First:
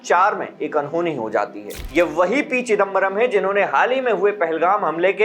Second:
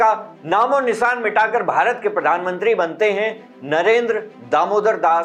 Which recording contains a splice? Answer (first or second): first